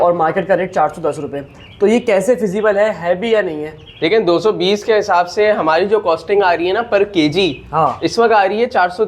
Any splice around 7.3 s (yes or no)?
no